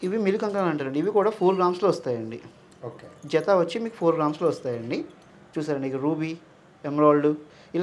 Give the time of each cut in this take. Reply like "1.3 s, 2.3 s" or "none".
none